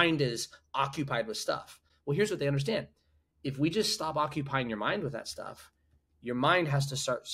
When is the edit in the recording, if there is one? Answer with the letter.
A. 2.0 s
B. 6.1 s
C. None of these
C